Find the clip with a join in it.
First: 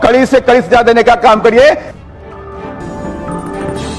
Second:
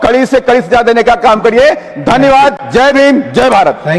first; 1 cut; at 1.9 s

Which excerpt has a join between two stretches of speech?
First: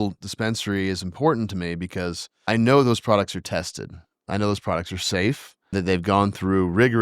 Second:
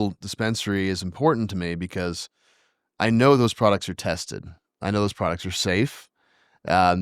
first; 2 cuts; at 2.3 s, 5.7 s

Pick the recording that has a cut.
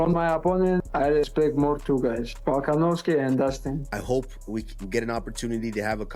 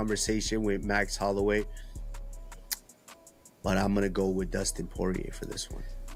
first; 1 cut; at 3.9 s

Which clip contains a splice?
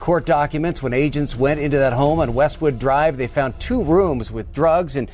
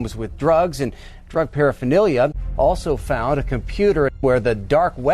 second; 2 cuts; at 2.4 s, 4.2 s

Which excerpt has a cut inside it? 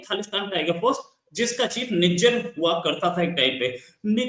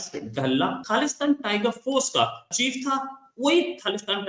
second; 2 cuts; at 0.8 s, 2.4 s

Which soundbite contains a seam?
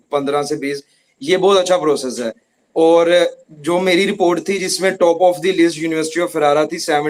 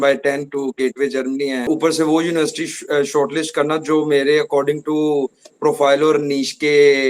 second; 1 cut; at 1.7 s

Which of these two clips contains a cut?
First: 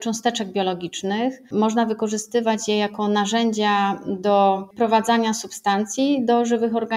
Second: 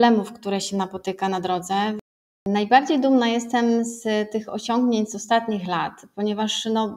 second; 1 cut; at 2.1 s

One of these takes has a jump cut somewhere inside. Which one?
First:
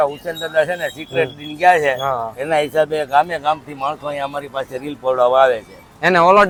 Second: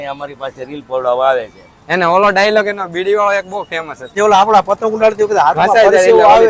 second; 1 cut; at 4.1 s

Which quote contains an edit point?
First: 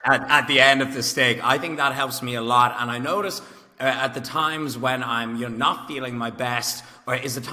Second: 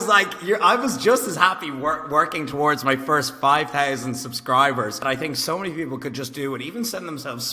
second; 1 cut; at 5.0 s

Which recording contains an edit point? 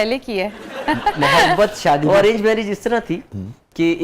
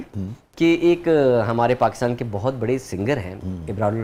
first; 1 cut; at 2.0 s

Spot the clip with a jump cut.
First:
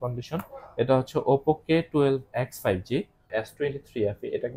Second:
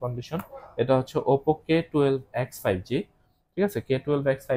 first; 1 cut; at 3.3 s

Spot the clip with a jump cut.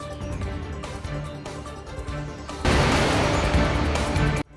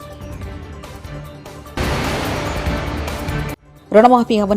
second; 2 cuts; at 1.8 s, 3.7 s

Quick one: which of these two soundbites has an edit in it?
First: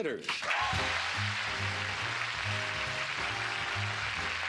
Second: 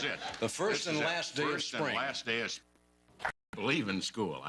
first; 1 cut; at 2.6 s

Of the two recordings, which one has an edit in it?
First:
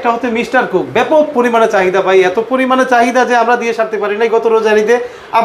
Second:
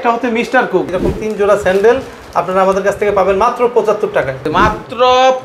second; 2 cuts; at 0.9 s, 4.5 s

